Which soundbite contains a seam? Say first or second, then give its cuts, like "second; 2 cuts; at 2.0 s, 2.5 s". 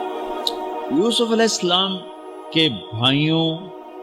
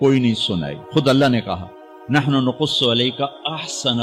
first; 1 cut; at 0.9 s